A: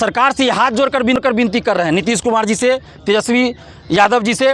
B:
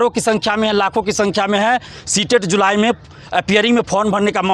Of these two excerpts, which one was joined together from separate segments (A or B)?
A